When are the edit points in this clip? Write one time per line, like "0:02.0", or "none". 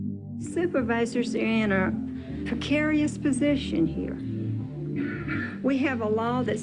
none